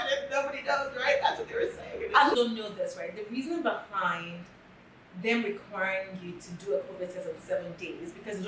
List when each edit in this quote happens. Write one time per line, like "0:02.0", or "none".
0:02.4